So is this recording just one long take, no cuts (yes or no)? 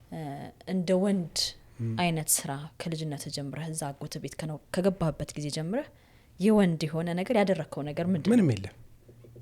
yes